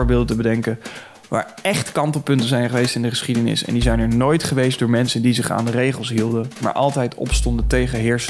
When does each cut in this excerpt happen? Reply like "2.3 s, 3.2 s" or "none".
none